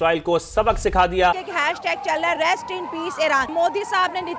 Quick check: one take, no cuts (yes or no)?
no